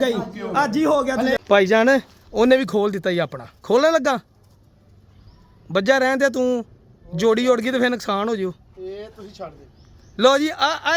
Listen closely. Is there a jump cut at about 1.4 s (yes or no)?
yes